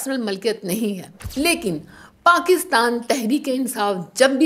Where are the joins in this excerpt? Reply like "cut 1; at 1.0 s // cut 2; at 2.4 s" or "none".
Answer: cut 1; at 1.1 s